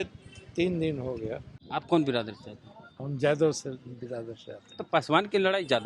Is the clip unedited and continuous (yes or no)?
no